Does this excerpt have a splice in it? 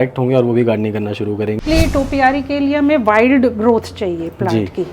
yes; 1 cut; at 1.6 s

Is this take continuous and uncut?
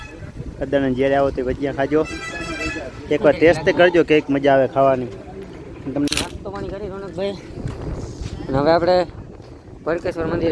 yes; 0 cuts

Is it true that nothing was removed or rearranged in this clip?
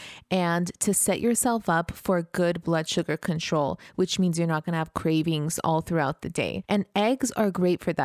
no; 1 cut; at 6.6 s

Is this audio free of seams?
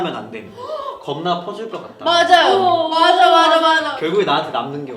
no; 1 cut; at 3.9 s

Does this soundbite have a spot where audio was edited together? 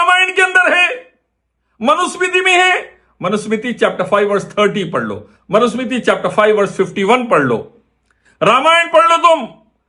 no; 0 cuts

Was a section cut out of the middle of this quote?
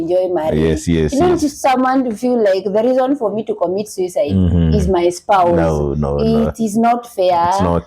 no; 0 cuts

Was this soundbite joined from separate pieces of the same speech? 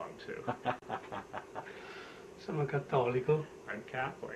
no; 0 cuts

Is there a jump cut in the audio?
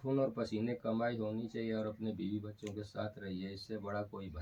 no; 0 cuts

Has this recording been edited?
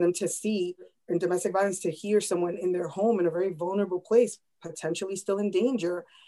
yes; 1 cut; at 1.0 s

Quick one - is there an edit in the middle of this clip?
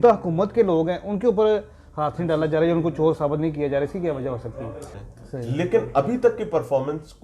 yes; 1 cut; at 5.0 s

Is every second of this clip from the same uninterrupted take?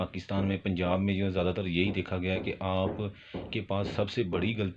yes; 0 cuts

